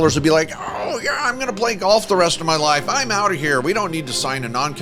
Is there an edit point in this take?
no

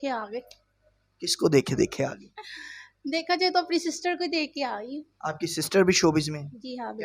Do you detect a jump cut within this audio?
no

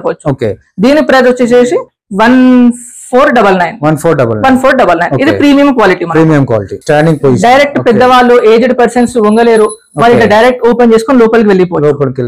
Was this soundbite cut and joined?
yes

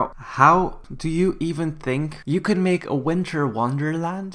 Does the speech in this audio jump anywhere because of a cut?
yes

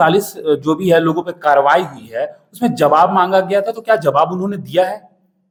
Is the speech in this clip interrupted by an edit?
no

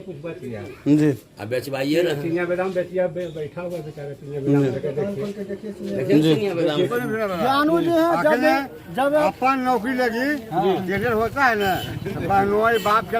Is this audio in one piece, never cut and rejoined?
no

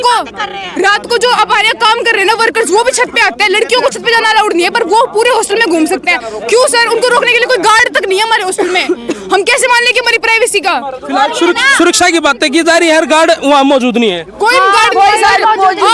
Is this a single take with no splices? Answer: yes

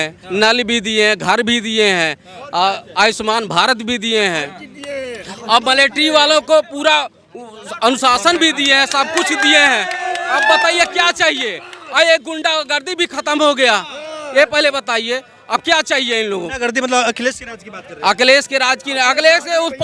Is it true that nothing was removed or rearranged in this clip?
yes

